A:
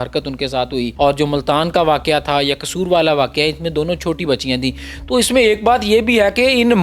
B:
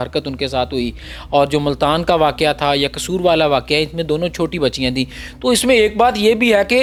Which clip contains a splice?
A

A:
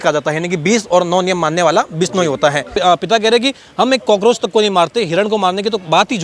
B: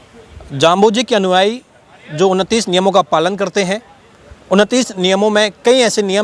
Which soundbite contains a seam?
A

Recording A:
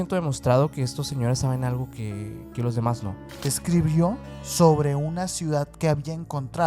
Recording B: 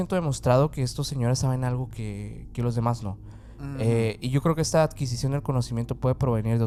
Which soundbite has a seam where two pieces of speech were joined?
A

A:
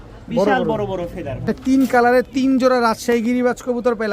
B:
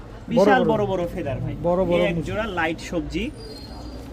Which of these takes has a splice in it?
A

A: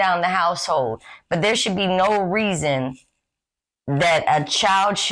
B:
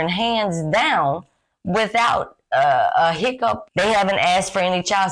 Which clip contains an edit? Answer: B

